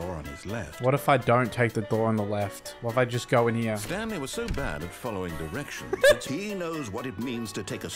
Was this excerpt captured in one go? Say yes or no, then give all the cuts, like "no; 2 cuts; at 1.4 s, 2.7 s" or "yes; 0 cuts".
no; 2 cuts; at 3.8 s, 6.2 s